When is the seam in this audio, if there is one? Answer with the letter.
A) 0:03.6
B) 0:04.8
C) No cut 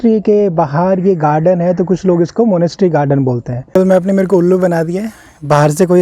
A